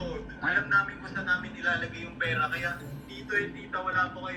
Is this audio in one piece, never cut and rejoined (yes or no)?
yes